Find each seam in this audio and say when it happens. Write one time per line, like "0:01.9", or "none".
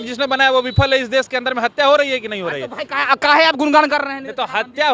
none